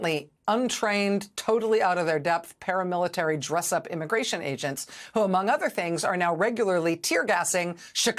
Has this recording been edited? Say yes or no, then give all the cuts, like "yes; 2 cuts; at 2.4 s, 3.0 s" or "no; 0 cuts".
no; 0 cuts